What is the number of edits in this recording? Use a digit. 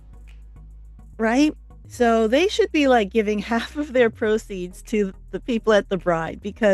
1